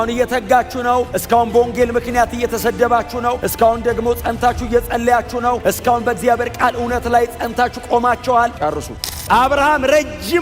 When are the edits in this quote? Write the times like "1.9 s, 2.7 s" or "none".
1.1 s, 3.4 s, 5.6 s, 9.1 s